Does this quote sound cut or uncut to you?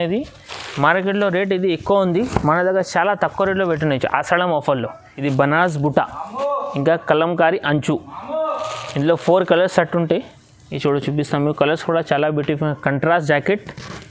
cut